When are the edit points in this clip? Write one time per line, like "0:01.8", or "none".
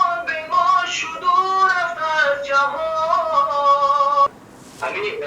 0:04.3